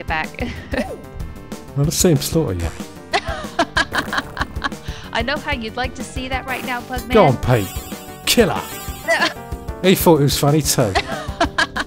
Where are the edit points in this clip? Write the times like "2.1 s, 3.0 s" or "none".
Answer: 10.9 s

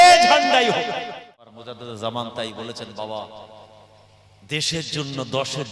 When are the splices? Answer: 1.5 s

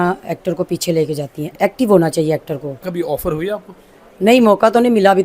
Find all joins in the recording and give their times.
2.9 s

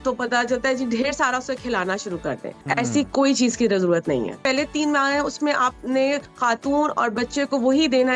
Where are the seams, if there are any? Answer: 2.5 s, 4.4 s, 6.3 s

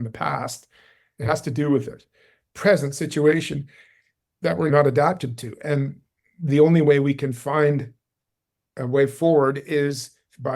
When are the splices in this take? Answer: 4.7 s

